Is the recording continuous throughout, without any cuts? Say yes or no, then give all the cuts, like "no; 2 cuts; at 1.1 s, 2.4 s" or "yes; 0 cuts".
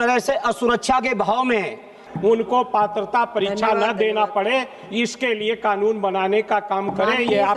no; 1 cut; at 2.0 s